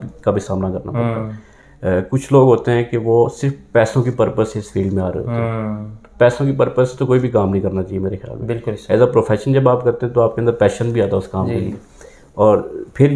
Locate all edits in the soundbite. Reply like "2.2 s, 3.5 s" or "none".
none